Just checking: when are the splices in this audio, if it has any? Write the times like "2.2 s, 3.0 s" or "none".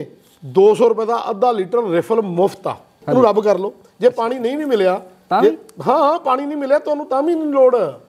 3.0 s